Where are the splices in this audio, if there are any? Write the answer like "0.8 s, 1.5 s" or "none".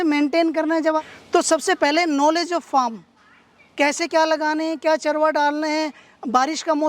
1.0 s